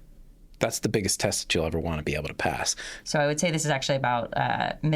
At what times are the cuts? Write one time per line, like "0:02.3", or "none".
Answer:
0:02.9